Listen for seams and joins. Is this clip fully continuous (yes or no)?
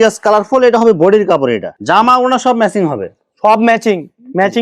no